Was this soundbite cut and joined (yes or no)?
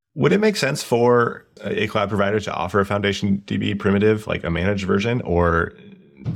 yes